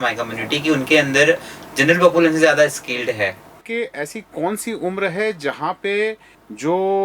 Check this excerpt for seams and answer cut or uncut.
cut